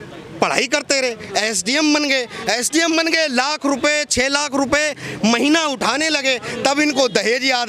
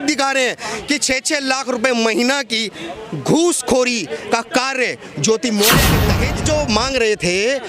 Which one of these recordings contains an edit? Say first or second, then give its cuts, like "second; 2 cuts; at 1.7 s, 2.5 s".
second; 1 cut; at 6.0 s